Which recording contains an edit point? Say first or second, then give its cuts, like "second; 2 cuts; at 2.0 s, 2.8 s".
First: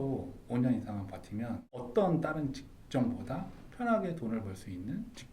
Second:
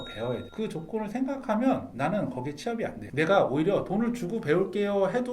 first; 1 cut; at 1.9 s